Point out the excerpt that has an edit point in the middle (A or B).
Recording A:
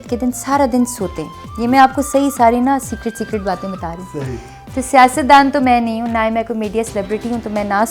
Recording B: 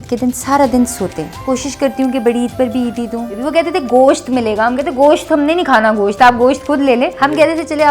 B